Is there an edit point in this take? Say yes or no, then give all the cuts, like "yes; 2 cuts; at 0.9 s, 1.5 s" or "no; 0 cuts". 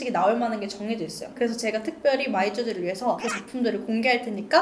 no; 0 cuts